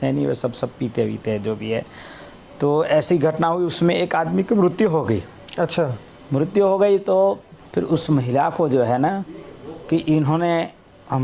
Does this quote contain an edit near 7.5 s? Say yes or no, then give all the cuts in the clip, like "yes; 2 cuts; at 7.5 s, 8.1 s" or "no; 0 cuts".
yes; 1 cut; at 7.5 s